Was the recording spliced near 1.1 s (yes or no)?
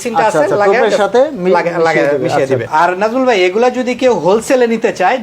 no